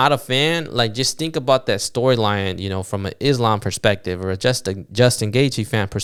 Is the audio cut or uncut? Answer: uncut